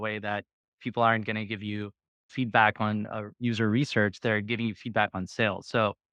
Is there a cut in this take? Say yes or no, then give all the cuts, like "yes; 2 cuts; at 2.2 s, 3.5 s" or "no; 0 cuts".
no; 0 cuts